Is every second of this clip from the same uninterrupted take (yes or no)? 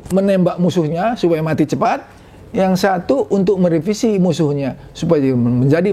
yes